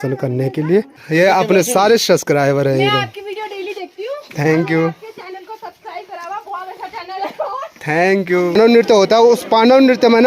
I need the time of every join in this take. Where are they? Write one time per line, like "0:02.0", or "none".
0:01.0
0:08.5